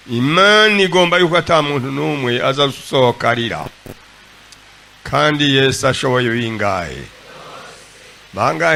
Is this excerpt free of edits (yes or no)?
yes